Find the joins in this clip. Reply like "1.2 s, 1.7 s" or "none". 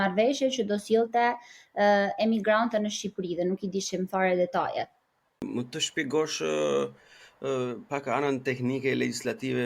5.5 s